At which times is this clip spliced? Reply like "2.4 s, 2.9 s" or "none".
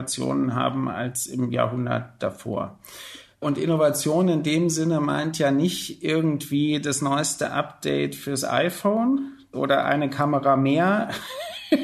none

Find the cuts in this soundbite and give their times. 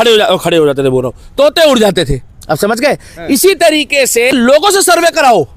4.3 s

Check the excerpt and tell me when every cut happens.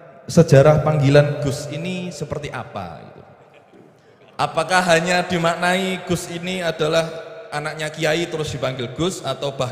none

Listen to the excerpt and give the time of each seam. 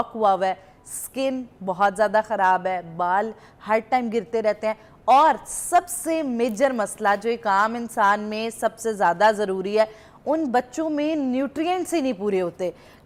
none

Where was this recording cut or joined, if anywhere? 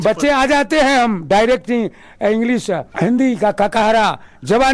2.9 s

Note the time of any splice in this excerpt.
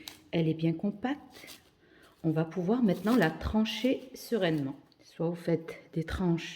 5.4 s

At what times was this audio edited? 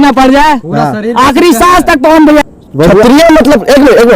2.4 s

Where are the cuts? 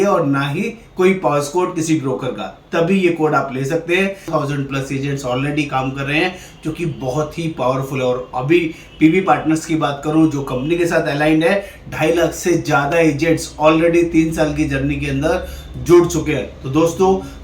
4.3 s

